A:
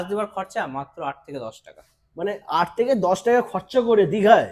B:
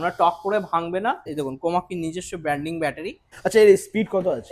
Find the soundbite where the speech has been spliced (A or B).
B